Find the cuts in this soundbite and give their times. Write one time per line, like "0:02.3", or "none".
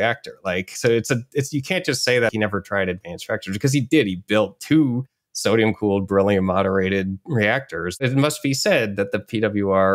0:02.3
0:08.0